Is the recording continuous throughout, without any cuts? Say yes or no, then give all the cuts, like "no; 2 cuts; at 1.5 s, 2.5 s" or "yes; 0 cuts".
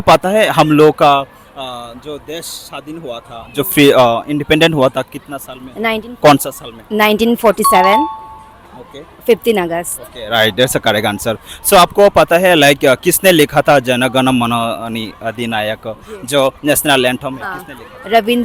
yes; 0 cuts